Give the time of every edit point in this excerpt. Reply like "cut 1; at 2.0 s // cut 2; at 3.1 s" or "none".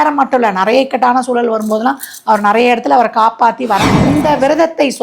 cut 1; at 4.1 s